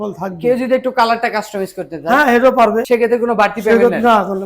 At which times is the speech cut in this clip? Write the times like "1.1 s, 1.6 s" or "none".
2.8 s